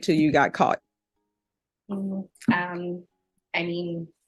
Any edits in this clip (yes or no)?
no